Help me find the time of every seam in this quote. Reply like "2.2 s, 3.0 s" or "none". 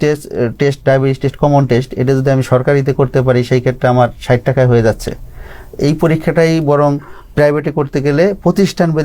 none